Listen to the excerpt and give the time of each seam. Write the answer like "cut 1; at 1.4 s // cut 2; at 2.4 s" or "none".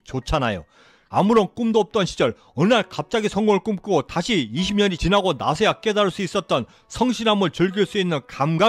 cut 1; at 1.0 s